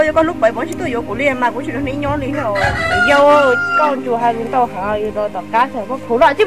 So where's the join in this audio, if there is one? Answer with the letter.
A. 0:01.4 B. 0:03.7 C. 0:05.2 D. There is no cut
D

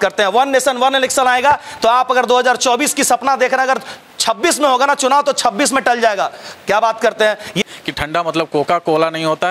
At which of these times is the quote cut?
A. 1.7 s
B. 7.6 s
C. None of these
B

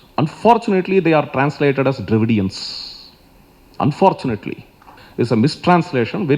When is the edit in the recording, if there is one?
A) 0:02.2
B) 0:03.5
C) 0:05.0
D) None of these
C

